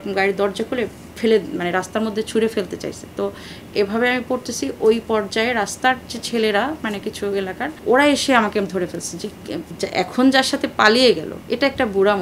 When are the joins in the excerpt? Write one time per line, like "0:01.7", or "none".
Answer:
0:09.7